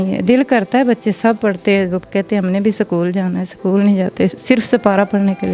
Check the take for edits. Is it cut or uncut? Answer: uncut